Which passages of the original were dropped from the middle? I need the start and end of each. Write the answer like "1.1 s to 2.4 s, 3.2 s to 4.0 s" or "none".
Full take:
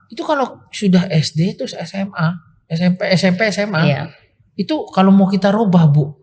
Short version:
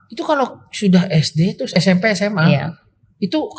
1.7 s to 3.1 s